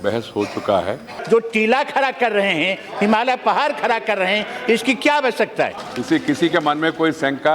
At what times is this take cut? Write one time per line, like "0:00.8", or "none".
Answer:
0:01.1
0:05.8